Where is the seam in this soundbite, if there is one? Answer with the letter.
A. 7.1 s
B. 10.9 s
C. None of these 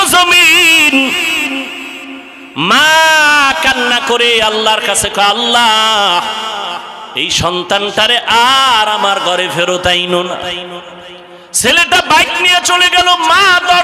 B